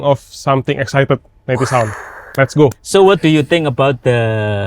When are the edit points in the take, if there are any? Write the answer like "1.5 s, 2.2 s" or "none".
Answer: 2.8 s